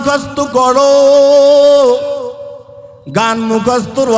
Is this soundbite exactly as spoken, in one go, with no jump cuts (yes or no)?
yes